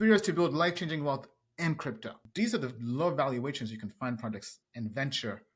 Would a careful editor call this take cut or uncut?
cut